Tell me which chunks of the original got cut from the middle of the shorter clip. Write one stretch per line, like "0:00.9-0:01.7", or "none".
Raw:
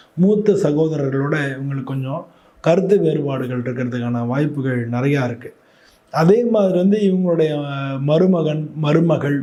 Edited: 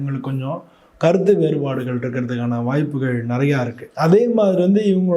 0:05.4-0:06.0

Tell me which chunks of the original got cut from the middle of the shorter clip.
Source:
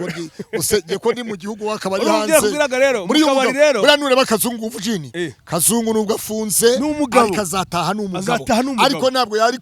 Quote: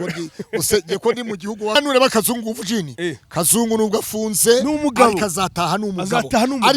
0:01.8-0:03.9

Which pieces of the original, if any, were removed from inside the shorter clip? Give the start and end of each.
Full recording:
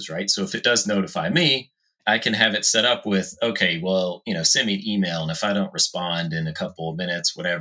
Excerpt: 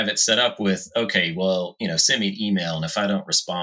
none

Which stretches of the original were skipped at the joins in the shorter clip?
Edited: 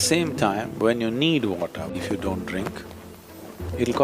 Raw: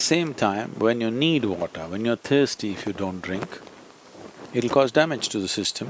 0:01.9-0:02.7

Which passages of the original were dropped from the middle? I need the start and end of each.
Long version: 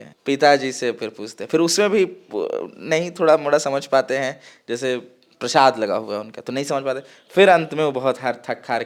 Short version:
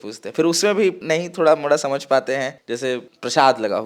0:02.2-0:02.8
0:04.6-0:05.0

